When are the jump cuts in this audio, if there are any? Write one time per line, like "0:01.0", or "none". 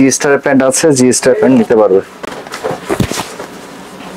none